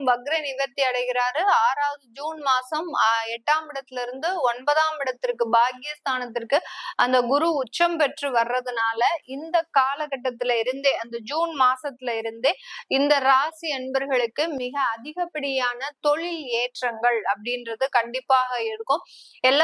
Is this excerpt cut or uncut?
uncut